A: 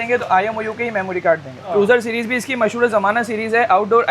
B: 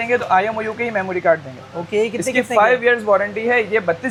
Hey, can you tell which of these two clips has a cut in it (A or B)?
A